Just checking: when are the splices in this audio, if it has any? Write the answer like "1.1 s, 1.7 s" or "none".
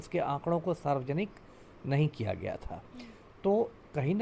none